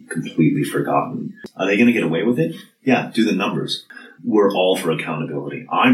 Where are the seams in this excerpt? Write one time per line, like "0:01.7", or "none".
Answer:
0:01.3
0:03.8